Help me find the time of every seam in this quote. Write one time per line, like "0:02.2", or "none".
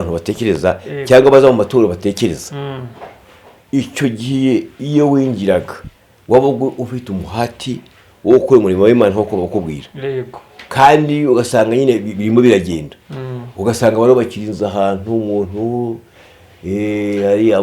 none